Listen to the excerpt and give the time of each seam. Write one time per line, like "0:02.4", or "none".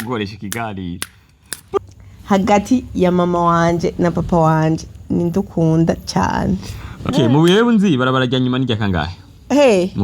0:01.8
0:07.1